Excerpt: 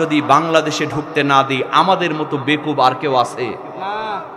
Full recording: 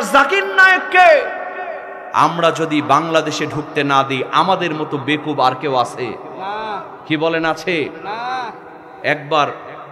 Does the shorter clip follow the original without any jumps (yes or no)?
yes